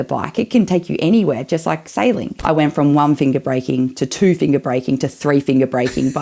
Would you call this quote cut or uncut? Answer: cut